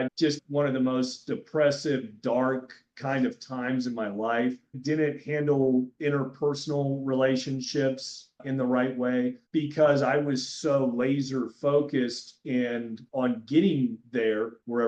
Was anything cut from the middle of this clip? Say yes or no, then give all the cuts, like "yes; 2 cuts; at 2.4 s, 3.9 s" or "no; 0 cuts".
no; 0 cuts